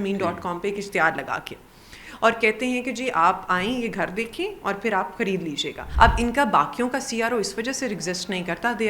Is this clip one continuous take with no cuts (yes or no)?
no